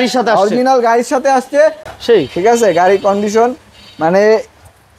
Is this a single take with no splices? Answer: no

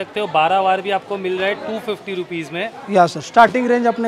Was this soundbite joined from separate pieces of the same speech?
no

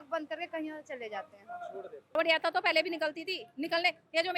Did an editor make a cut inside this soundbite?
yes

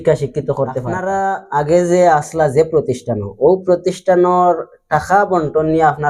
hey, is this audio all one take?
no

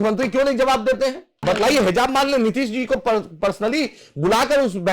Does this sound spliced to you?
yes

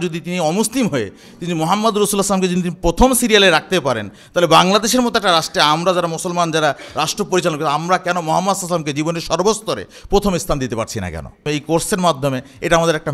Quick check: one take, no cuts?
no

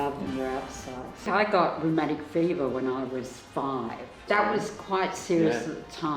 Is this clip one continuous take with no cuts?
no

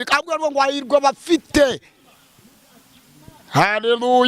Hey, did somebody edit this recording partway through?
no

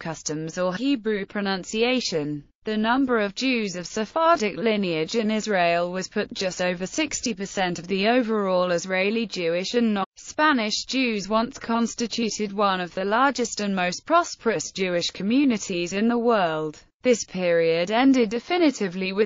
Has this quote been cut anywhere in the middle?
no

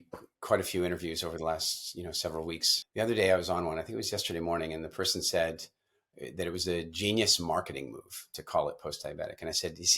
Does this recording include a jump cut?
yes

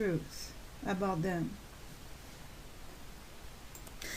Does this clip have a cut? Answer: yes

